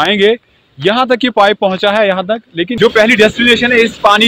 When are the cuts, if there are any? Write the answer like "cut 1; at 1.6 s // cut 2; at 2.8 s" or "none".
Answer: cut 1; at 2.7 s